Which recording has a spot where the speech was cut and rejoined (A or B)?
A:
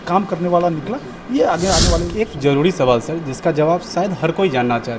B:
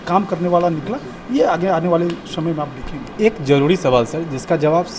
A